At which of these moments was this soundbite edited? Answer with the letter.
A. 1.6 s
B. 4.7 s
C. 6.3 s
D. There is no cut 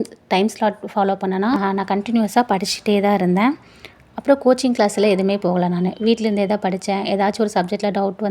A